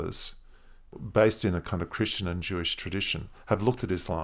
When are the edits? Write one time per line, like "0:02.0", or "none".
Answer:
0:00.9